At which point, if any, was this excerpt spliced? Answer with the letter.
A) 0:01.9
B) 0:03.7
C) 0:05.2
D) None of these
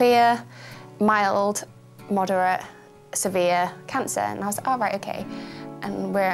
A